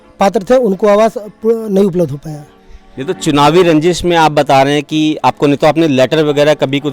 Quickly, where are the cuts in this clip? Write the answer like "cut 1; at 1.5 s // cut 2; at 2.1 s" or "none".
none